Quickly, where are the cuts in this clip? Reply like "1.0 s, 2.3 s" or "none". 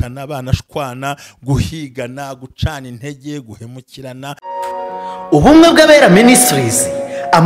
4.4 s